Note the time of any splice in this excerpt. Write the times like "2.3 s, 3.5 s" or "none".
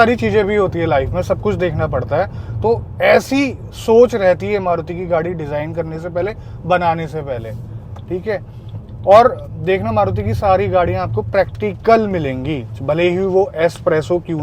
none